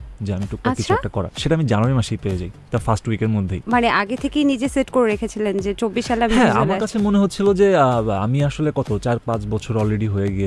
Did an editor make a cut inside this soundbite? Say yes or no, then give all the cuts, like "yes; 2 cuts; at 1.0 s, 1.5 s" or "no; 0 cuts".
no; 0 cuts